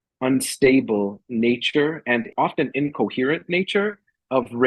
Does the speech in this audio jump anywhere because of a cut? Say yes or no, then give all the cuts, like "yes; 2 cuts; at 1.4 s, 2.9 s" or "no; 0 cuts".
yes; 1 cut; at 2.3 s